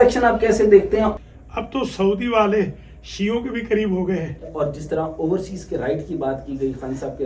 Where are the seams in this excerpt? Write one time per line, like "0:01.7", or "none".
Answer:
0:01.1
0:04.5